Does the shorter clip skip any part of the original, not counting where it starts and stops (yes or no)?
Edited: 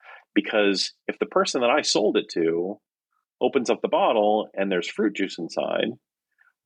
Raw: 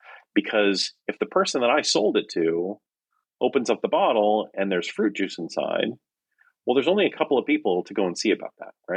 no